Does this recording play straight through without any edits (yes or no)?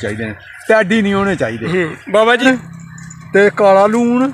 no